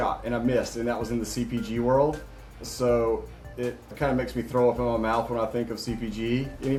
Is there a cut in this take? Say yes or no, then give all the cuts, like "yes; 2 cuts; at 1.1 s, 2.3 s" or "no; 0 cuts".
no; 0 cuts